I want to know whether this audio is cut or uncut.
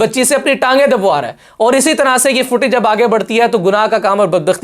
uncut